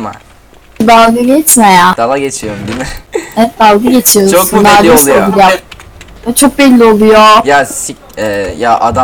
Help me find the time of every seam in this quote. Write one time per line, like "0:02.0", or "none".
none